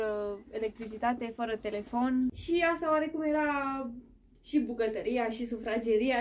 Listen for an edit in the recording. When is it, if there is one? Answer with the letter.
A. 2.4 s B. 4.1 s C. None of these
A